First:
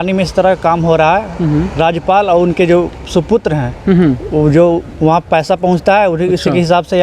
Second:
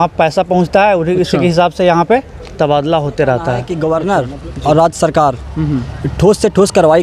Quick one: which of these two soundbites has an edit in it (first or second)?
second